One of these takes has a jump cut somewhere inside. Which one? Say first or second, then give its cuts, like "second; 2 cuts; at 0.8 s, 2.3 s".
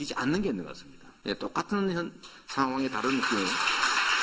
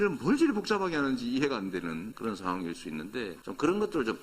second; 1 cut; at 2.1 s